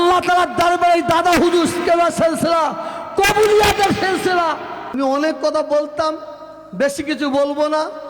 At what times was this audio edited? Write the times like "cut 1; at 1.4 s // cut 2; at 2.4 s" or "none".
cut 1; at 4.9 s